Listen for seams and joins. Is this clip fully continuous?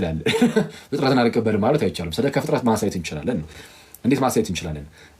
yes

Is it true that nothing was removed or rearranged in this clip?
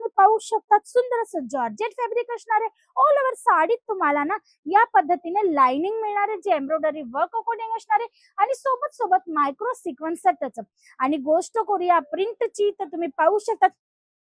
yes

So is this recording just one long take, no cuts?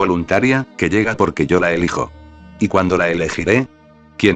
no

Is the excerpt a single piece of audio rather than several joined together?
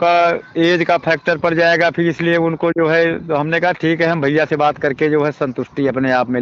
yes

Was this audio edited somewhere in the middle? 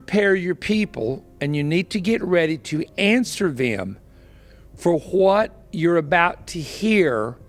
no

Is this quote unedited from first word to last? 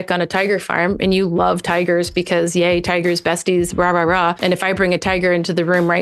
no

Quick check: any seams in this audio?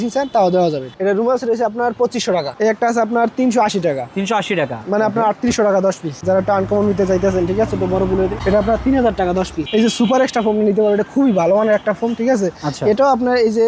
yes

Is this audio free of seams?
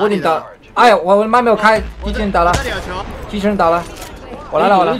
no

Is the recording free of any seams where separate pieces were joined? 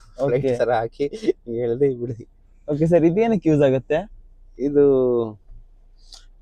yes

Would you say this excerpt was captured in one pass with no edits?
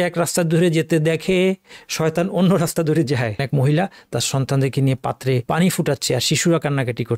no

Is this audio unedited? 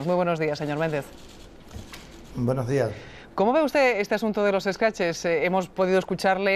no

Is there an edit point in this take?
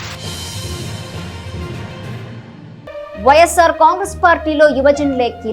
no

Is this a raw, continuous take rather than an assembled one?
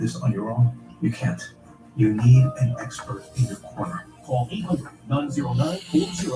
no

